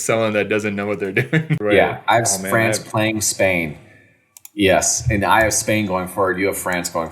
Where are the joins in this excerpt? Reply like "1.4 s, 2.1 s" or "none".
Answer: 1.6 s